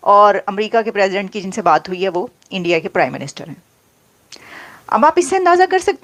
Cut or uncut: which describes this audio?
uncut